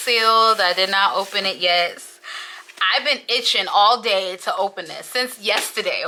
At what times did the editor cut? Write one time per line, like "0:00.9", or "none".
none

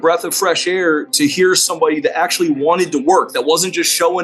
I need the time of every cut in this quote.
none

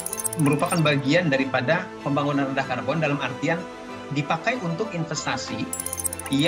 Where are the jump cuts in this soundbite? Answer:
none

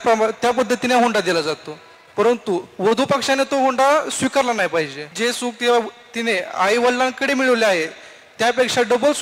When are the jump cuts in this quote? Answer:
0:05.0

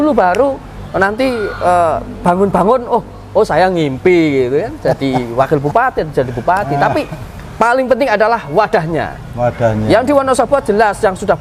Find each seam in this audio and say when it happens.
none

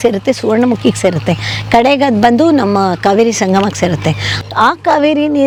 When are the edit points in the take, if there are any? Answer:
none

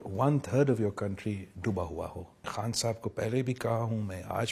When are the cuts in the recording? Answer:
0:02.5

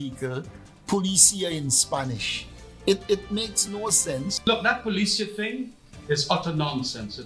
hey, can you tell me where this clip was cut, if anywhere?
0:04.4

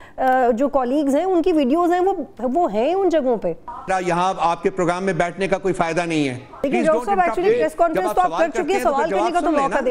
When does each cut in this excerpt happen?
0:03.9
0:06.6

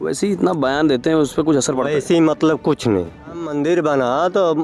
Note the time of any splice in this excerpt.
0:03.5

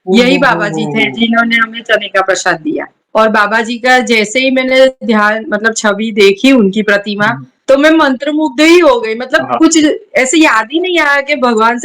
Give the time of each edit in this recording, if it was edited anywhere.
0:03.0

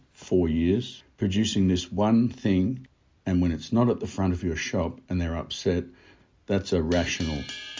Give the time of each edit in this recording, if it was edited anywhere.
0:01.0
0:02.9

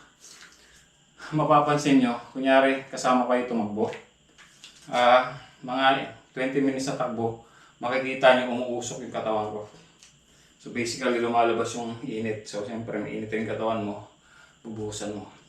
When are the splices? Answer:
none

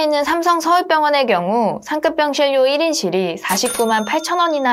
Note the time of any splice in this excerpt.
none

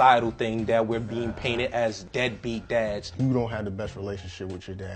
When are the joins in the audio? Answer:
0:02.0

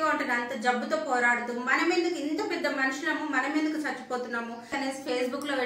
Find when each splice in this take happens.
0:04.7

